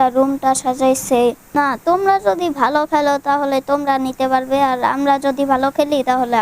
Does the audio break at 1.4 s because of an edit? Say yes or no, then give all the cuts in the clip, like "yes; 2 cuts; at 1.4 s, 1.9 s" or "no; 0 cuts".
yes; 1 cut; at 1.4 s